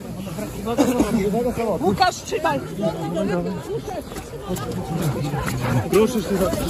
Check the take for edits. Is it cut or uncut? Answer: uncut